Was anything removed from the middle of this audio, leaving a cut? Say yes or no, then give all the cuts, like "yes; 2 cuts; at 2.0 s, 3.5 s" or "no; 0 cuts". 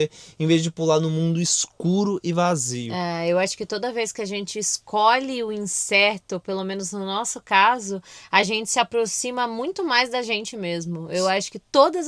no; 0 cuts